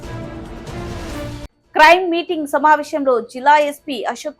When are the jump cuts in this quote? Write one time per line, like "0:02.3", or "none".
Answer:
none